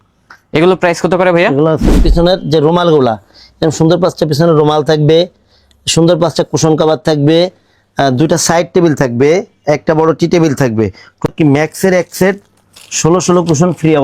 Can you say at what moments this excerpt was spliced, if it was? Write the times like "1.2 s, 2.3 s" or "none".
2.0 s, 11.3 s